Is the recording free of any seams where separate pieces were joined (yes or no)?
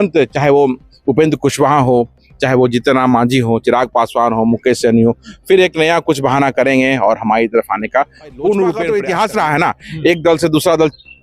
no